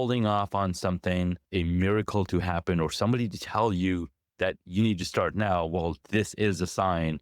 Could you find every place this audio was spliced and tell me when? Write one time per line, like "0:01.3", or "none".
0:01.4